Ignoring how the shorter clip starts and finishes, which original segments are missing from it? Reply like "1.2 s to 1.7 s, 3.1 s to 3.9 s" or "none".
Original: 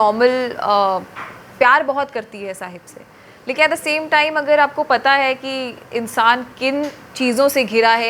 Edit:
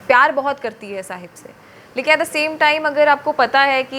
none